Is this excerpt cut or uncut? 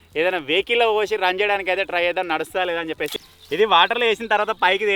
cut